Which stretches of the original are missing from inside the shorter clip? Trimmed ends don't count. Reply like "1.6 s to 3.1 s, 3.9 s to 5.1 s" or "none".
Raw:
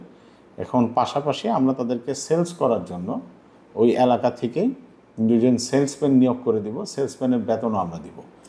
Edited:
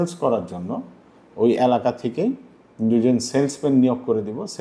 none